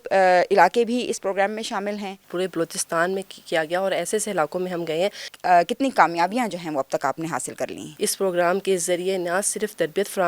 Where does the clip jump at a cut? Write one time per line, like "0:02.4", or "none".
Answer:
0:02.2
0:05.3
0:07.9